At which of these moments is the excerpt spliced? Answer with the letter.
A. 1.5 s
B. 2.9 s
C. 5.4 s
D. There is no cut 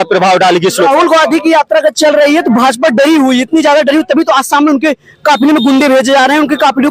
D